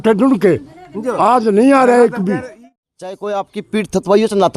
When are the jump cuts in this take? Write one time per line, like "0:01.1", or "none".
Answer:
0:02.5